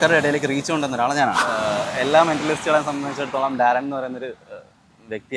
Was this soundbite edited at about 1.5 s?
yes; 1 cut; at 1.5 s

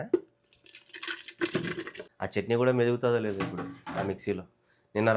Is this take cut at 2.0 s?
yes; 1 cut; at 2.0 s

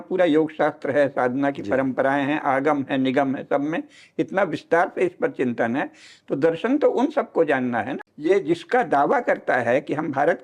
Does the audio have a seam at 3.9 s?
no; 1 cut; at 8.0 s

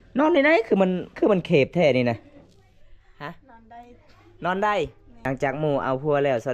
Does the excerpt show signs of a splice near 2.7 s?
no; 1 cut; at 5.1 s

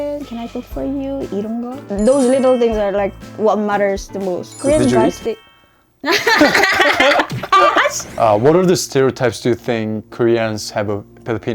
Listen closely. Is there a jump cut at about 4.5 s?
yes; 3 cuts; at 1.8 s, 4.5 s, 8.1 s

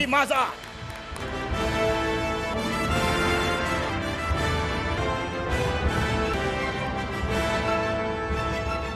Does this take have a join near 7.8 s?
no; 5 cuts; at 1.2 s, 2.5 s, 3.9 s, 5.0 s, 6.3 s

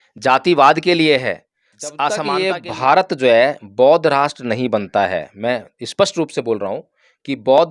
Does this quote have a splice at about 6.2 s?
no; 1 cut; at 2.2 s

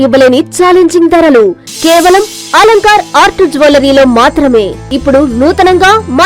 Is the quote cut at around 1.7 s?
no; 1 cut; at 4.9 s

